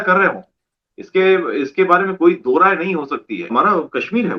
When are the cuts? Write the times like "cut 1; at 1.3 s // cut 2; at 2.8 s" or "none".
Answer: cut 1; at 3.5 s